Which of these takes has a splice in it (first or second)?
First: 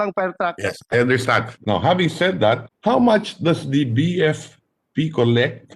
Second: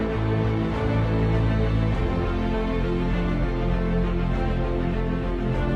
first